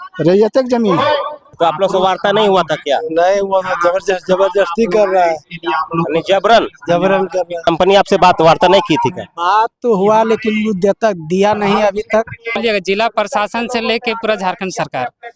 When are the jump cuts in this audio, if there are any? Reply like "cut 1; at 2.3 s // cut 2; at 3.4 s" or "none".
cut 1; at 1.4 s // cut 2; at 7.7 s // cut 3; at 12.6 s